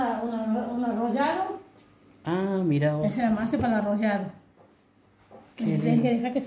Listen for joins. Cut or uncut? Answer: uncut